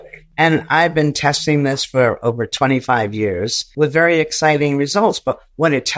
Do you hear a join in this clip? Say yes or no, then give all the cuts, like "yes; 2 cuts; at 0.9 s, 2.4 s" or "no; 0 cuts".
yes; 1 cut; at 3.6 s